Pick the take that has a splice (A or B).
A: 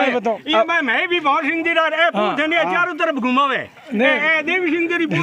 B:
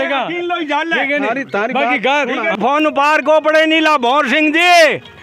B